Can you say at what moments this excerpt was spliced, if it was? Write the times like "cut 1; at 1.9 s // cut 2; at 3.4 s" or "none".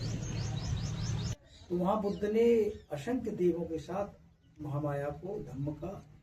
cut 1; at 1.3 s